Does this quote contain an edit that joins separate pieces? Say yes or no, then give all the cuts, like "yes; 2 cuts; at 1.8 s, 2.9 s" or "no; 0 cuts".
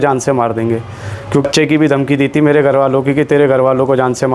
yes; 1 cut; at 1.4 s